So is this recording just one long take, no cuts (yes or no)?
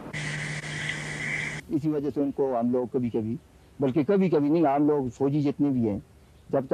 no